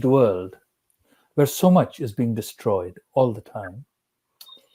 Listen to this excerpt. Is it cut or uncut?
uncut